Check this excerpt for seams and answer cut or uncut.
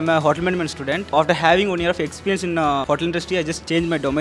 cut